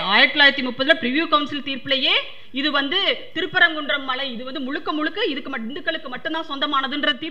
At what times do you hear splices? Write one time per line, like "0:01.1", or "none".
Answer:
none